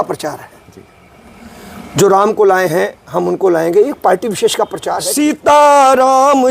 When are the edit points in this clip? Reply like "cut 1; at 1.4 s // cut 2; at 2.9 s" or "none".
cut 1; at 4.8 s